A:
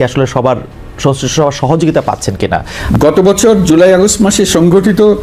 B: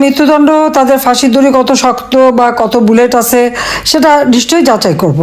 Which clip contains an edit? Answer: A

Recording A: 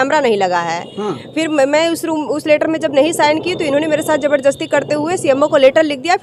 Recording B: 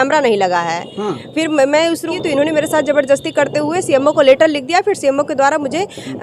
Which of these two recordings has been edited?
B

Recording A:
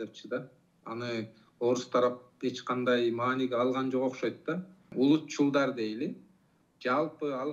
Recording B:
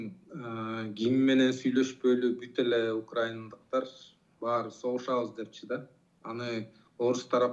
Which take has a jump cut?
A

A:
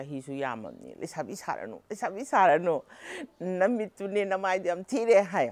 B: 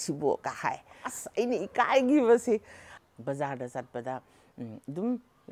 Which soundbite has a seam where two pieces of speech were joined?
B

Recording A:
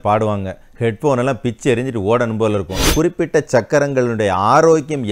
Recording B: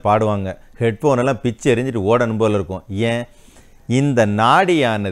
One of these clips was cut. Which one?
A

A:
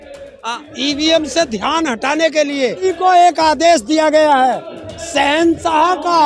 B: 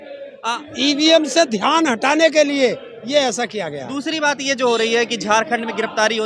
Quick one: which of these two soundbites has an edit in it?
A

